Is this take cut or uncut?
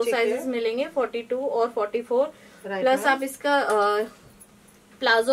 uncut